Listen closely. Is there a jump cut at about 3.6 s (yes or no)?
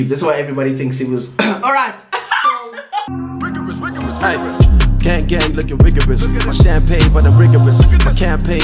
yes